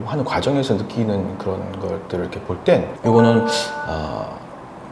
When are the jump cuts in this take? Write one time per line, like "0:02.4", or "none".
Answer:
0:02.9